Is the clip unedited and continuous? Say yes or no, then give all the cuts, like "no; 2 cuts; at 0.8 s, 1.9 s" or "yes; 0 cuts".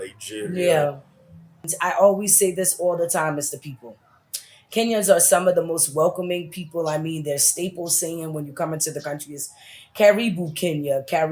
no; 1 cut; at 1.7 s